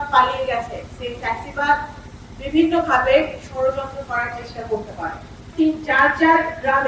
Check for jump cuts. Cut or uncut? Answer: cut